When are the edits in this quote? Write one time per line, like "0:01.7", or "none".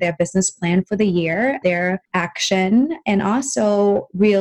0:02.0